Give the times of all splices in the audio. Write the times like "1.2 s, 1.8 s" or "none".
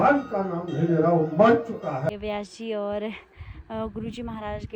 2.1 s